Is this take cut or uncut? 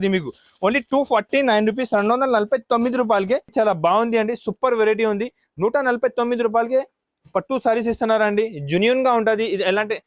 cut